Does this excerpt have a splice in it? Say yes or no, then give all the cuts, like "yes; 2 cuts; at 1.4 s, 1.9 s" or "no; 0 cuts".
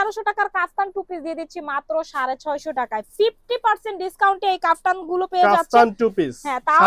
no; 0 cuts